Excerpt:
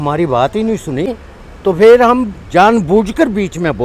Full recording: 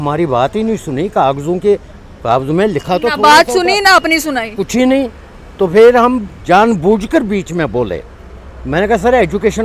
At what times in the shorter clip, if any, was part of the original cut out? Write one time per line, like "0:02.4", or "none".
0:01.1